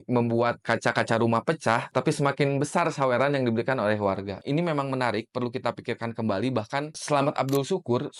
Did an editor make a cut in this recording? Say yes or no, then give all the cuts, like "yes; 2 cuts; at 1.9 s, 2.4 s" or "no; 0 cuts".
no; 0 cuts